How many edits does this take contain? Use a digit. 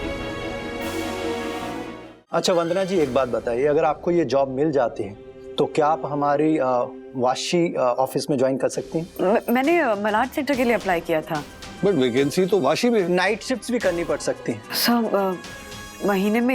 4